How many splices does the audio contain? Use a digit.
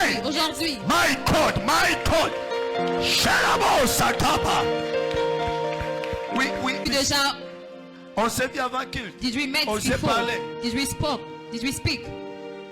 1